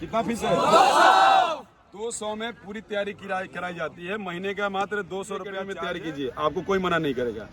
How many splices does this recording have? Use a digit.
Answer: 1